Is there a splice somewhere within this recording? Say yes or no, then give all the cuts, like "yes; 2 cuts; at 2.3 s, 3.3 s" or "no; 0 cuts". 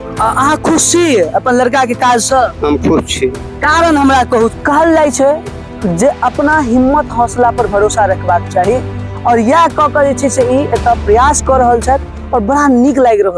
yes; 1 cut; at 4.5 s